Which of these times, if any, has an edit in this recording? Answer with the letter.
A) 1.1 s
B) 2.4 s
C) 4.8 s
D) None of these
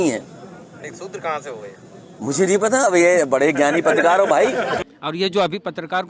C